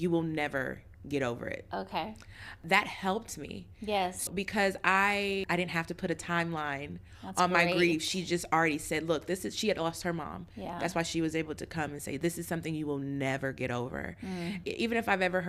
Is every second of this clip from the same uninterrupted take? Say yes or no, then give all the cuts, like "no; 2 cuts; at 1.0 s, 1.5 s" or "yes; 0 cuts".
no; 4 cuts; at 2.6 s, 4.3 s, 5.5 s, 14.6 s